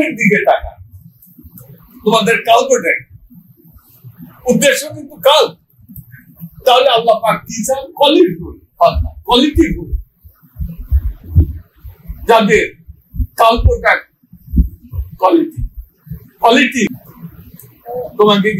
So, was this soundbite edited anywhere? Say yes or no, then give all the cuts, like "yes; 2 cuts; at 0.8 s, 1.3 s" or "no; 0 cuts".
yes; 1 cut; at 16.9 s